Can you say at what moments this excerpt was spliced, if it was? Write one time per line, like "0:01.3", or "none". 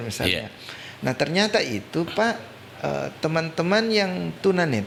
none